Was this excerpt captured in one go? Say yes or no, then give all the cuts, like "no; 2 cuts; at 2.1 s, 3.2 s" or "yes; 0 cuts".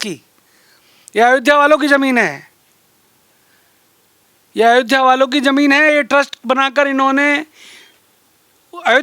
yes; 0 cuts